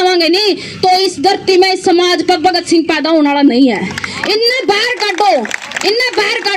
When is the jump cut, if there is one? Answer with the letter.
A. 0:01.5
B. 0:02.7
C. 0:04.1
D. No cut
D